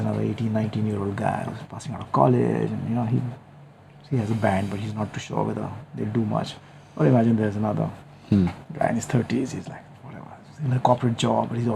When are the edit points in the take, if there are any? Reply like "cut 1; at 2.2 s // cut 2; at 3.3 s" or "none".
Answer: none